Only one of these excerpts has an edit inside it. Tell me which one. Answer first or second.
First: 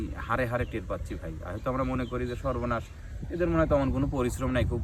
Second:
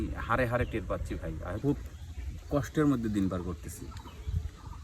second